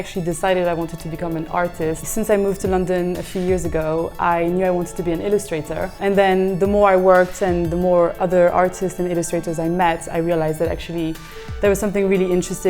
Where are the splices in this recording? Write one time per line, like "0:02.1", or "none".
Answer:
0:02.1
0:06.0